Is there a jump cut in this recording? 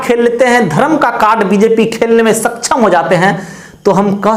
no; 0 cuts

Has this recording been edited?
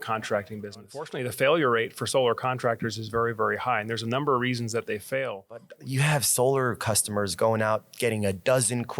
yes; 2 cuts; at 1.1 s, 5.7 s

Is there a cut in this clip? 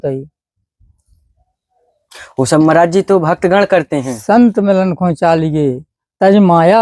no; 0 cuts

